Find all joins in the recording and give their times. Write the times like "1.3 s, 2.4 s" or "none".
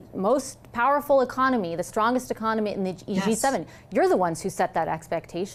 none